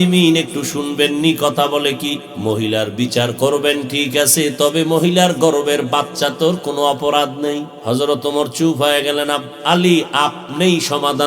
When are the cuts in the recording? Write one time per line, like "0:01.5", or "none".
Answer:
0:02.3
0:07.7